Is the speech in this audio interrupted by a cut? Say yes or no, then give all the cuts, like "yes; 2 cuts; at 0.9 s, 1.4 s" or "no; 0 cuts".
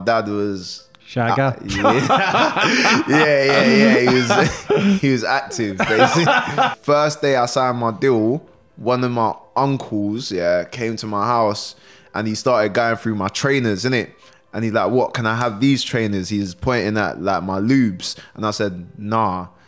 yes; 1 cut; at 6.8 s